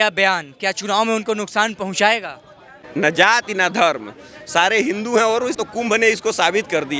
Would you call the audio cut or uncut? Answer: cut